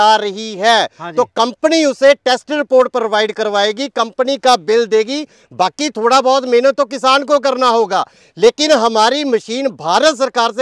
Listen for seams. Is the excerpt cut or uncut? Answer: uncut